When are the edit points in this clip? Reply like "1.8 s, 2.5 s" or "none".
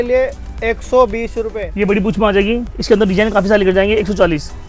1.6 s